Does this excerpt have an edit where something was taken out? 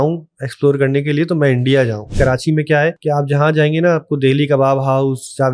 yes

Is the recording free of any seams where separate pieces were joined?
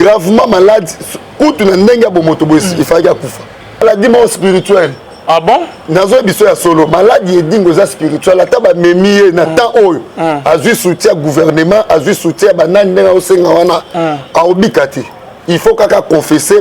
no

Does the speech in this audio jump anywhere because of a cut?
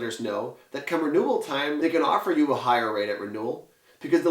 yes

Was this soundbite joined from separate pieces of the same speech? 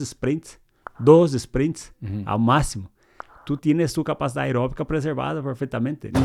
no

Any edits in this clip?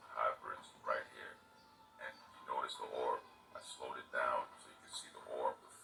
no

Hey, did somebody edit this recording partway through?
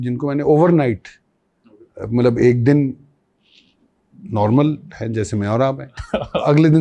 no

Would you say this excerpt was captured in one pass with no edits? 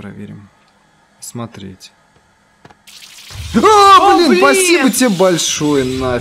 yes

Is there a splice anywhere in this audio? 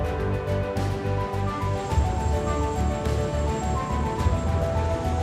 no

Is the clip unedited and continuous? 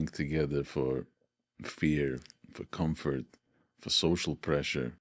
yes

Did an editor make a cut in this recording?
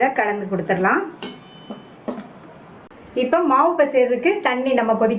yes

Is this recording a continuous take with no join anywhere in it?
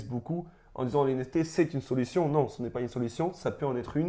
yes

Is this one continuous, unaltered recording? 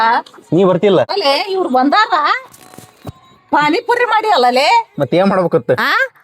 no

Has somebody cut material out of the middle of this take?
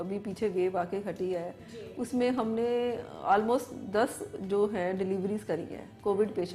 no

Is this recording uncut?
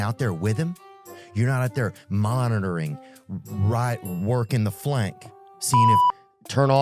no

